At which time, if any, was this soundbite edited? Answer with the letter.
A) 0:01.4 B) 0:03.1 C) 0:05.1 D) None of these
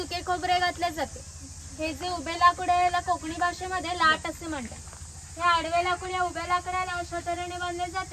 D